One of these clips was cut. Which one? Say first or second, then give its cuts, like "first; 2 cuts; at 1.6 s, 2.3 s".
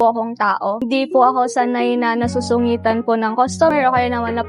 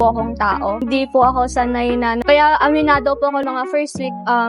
second; 1 cut; at 2.2 s